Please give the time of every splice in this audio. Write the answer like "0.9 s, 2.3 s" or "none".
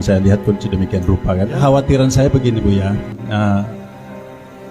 1.6 s